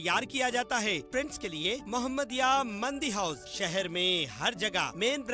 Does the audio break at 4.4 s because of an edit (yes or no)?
no